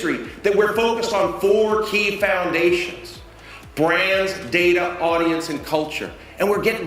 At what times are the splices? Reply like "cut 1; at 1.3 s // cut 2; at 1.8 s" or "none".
none